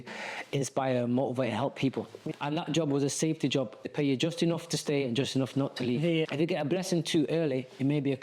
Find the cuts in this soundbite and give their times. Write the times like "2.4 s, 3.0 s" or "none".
2.2 s, 3.9 s, 6.3 s

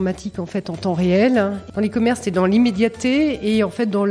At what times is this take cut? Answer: 1.6 s

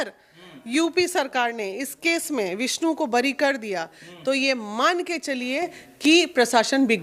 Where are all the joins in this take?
none

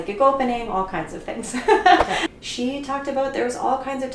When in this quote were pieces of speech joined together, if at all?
2.2 s

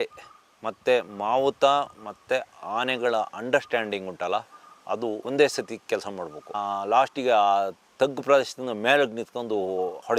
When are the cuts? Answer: none

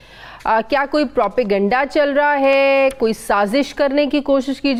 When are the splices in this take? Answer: none

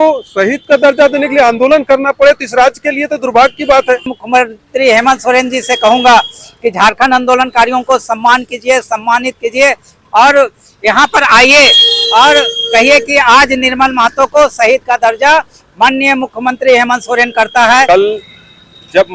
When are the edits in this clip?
4.1 s, 17.9 s

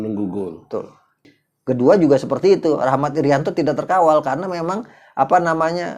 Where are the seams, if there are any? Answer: 1.2 s

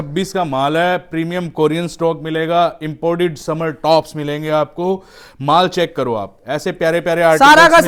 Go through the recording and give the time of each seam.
none

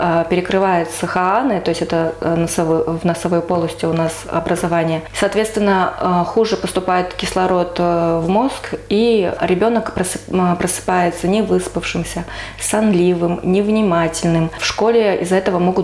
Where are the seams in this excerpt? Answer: 5.1 s, 9.4 s, 14.6 s

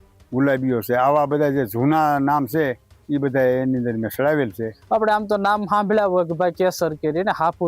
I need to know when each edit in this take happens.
4.7 s

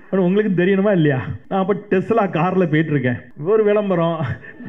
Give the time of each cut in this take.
1.3 s, 3.3 s

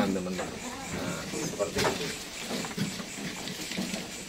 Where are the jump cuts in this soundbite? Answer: none

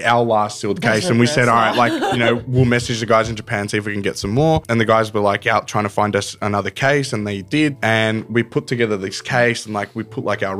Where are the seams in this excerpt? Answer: 4.6 s, 7.7 s

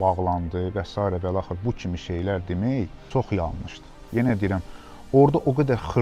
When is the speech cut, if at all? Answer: 3.0 s, 4.0 s

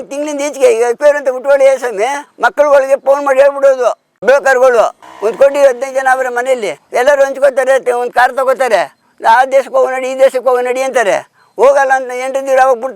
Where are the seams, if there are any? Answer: 5.0 s, 6.8 s

